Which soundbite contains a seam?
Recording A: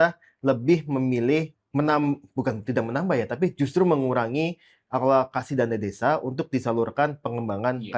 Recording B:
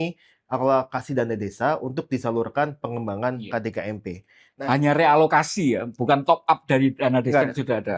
A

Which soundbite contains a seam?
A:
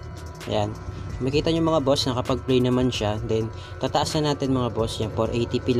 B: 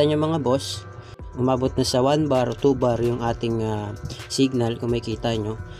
B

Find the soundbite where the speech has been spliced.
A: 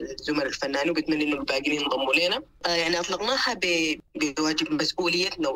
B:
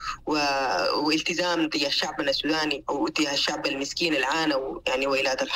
A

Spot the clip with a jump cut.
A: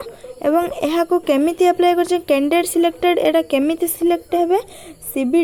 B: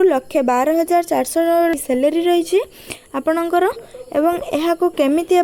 B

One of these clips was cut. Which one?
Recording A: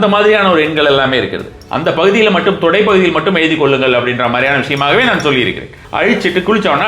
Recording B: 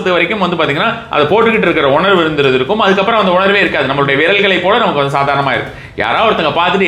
A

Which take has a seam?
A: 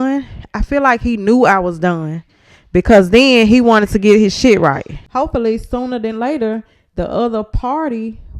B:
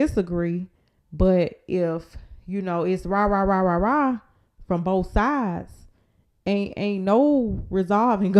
A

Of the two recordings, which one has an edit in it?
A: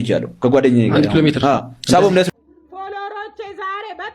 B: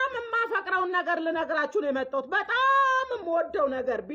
A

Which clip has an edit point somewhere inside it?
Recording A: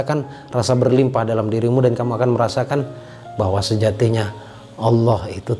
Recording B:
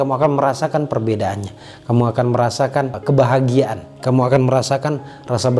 B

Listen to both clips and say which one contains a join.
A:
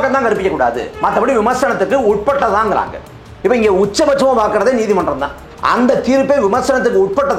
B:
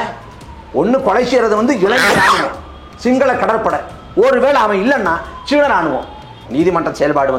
B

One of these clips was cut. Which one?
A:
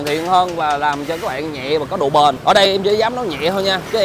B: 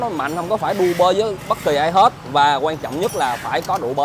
A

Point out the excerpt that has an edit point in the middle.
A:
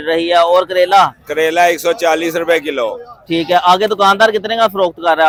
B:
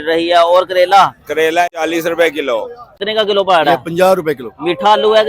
B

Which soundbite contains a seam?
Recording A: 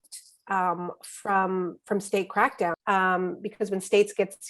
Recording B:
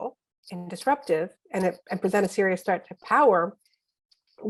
A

